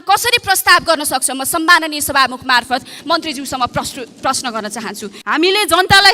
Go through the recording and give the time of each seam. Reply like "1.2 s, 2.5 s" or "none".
5.1 s